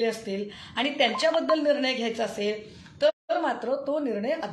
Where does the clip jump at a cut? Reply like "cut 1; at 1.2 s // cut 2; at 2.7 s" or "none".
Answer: none